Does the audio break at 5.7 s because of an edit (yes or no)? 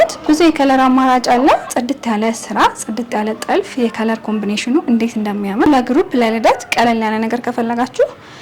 yes